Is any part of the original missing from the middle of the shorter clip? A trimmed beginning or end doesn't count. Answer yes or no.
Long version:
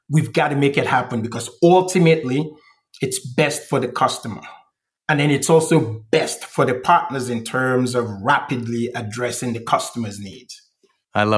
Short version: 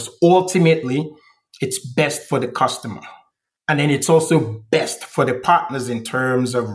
no